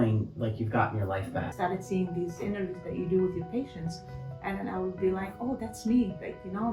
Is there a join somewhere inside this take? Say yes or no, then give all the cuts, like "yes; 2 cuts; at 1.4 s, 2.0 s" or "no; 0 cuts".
yes; 1 cut; at 1.5 s